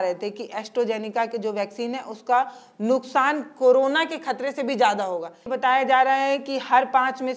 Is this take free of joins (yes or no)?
no